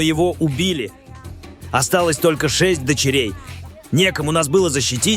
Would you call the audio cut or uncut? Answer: uncut